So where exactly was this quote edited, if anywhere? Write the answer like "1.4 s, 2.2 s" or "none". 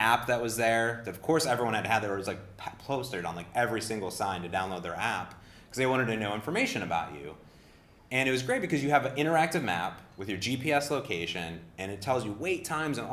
5.4 s